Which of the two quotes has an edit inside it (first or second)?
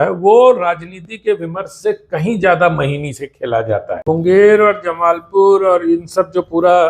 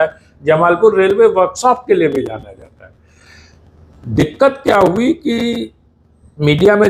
first